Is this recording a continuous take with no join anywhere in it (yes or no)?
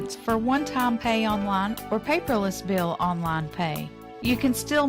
yes